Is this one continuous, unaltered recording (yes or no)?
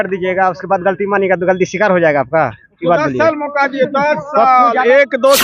yes